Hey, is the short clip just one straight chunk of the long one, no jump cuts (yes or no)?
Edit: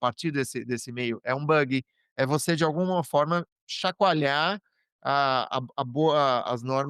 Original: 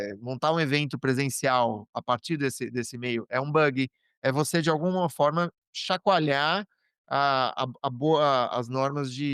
yes